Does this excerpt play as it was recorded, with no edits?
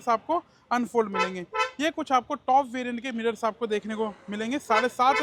yes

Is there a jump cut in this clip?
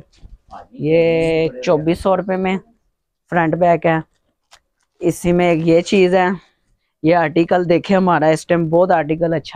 no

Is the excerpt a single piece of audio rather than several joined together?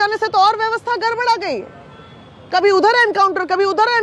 yes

